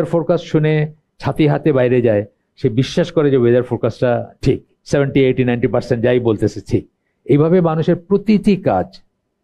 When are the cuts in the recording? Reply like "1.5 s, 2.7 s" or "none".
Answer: 4.7 s